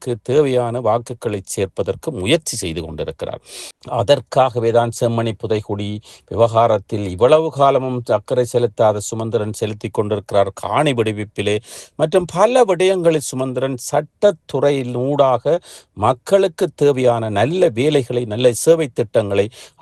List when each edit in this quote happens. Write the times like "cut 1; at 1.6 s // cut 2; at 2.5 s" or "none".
none